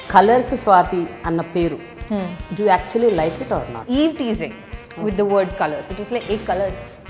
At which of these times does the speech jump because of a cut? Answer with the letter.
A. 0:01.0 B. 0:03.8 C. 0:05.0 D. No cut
B